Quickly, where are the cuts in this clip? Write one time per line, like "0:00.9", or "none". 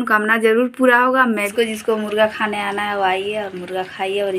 0:01.5